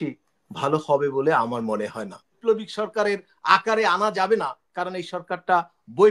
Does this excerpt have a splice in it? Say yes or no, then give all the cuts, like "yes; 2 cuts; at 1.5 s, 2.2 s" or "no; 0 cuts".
yes; 1 cut; at 2.4 s